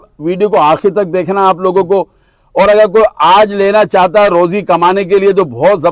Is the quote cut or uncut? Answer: uncut